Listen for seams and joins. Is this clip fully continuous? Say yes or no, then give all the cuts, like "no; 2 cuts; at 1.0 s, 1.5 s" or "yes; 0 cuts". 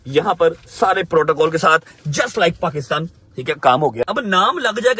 no; 1 cut; at 4.1 s